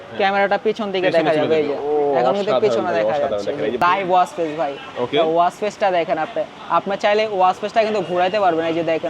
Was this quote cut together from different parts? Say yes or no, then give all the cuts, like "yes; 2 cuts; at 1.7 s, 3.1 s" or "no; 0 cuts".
yes; 1 cut; at 3.8 s